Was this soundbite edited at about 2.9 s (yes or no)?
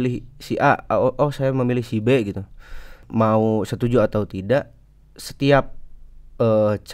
yes